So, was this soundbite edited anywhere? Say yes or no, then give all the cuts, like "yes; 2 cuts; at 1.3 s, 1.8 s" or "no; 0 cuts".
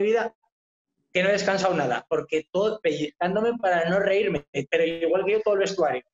no; 0 cuts